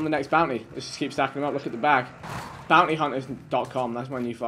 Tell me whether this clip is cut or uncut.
uncut